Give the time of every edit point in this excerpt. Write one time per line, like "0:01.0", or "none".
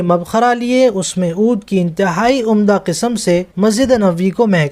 0:03.5